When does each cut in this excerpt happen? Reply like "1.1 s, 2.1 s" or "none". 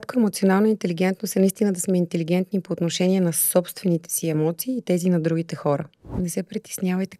6.0 s